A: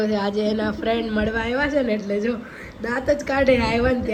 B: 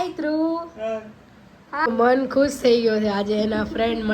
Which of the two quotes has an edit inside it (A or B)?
B